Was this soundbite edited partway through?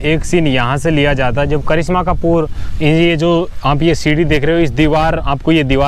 no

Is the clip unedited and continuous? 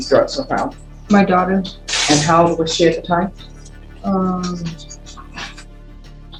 yes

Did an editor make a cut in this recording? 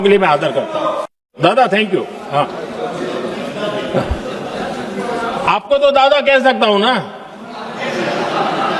yes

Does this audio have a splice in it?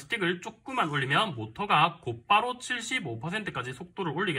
no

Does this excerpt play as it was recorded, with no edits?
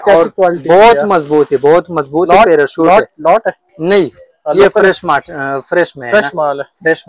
yes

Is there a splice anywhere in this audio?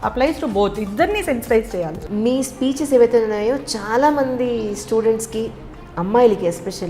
yes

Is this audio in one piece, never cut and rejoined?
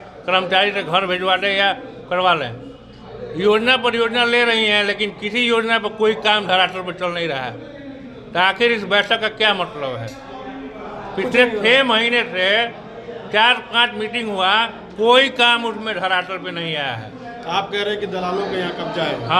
yes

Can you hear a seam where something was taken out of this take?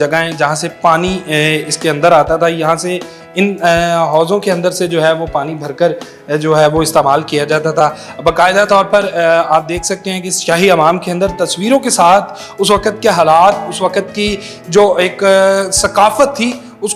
no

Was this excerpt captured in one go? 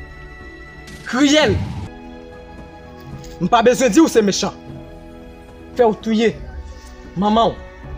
yes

